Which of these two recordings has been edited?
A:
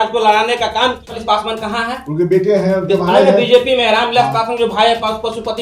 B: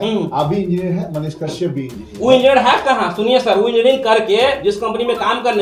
A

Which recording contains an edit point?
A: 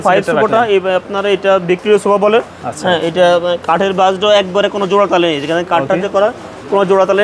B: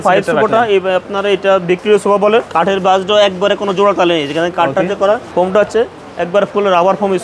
B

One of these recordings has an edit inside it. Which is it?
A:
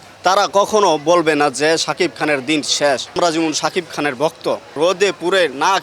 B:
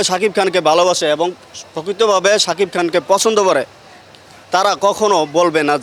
A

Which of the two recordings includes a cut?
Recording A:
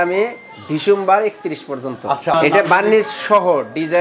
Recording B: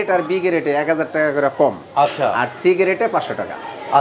A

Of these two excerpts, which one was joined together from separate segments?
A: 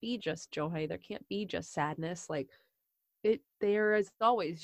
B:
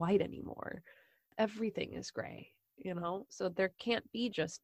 B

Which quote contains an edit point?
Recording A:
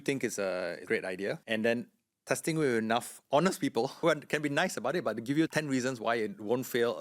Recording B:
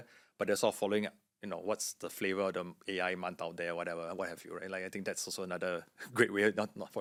A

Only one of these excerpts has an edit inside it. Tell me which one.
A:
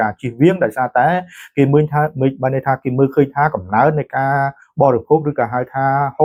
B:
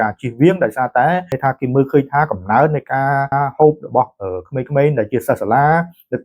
B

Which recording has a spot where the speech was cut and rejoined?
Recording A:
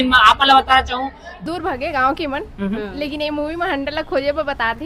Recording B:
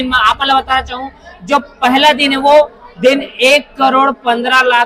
A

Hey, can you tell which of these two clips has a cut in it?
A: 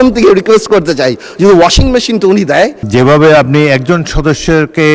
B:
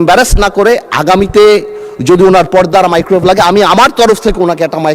A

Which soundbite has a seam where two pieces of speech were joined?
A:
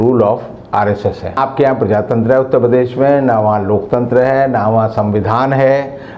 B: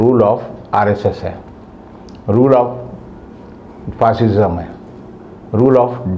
A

